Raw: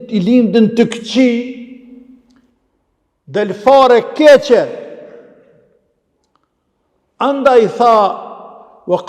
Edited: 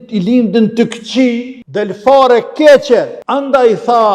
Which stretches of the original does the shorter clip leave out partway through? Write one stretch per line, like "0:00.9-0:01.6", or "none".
0:01.6-0:03.2
0:04.8-0:07.1